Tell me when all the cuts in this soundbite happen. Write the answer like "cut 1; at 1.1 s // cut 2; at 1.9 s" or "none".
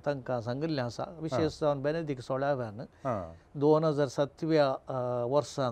none